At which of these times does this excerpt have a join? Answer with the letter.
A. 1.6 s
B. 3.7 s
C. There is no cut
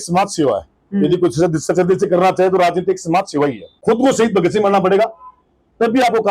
B